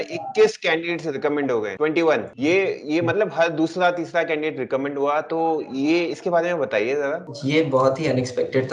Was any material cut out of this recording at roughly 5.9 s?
no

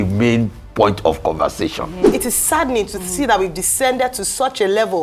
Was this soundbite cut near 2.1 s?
yes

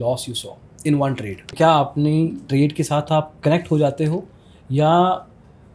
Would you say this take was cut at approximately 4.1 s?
no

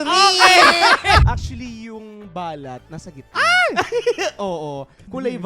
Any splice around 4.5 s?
no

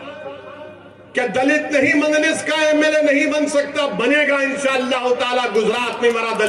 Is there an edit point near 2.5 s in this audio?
no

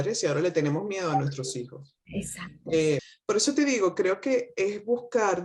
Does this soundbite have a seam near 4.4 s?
no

